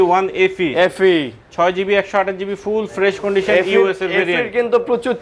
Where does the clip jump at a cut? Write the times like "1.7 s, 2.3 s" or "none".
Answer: none